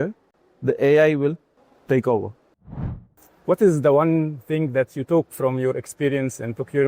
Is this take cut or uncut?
cut